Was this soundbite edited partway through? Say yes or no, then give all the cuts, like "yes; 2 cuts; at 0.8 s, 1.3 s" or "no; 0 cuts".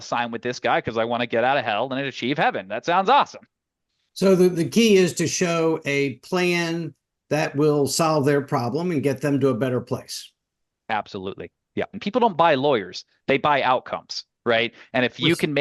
yes; 1 cut; at 12.0 s